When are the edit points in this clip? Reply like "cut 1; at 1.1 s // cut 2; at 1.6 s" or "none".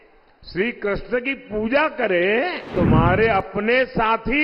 cut 1; at 2.7 s